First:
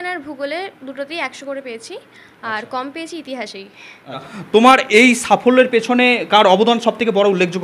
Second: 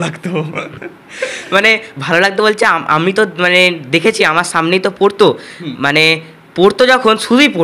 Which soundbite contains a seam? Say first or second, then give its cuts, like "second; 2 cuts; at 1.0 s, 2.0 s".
first; 1 cut; at 4.3 s